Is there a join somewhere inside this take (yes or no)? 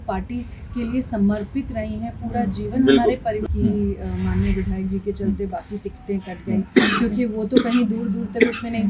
yes